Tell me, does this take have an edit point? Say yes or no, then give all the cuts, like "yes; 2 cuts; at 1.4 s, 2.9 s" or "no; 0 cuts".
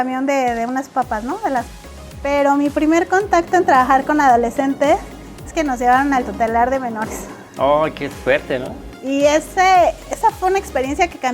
yes; 1 cut; at 1.7 s